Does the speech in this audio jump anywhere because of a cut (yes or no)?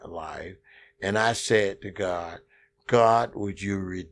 no